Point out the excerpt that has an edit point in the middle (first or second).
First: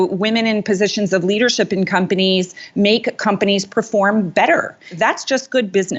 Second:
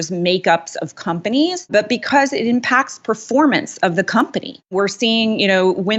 second